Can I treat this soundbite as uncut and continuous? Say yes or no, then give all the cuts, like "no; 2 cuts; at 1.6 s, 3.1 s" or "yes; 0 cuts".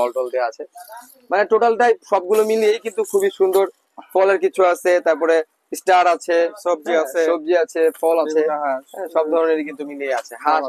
yes; 0 cuts